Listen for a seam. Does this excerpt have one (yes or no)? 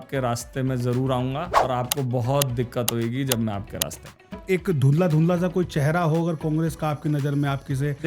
yes